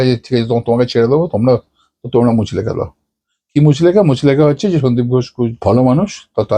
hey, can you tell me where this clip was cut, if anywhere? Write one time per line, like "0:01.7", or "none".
none